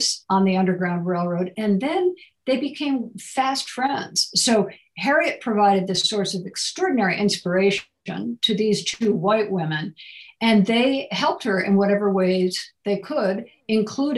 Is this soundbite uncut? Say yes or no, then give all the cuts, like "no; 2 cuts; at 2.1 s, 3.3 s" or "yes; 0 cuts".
yes; 0 cuts